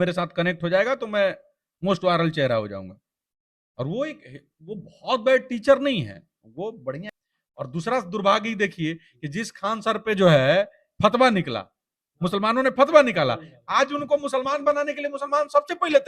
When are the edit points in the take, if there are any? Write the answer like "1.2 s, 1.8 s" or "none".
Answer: 7.0 s